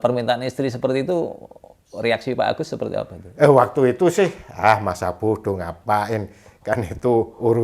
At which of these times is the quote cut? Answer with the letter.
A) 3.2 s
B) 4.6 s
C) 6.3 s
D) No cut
B